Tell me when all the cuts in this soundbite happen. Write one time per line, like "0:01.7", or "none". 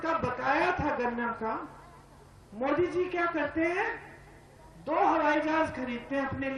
none